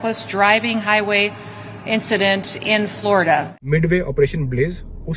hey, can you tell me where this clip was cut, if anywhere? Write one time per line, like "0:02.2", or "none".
0:03.6